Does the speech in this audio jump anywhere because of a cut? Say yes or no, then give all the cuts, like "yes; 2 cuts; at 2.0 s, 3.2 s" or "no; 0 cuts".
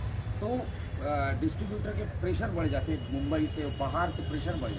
no; 0 cuts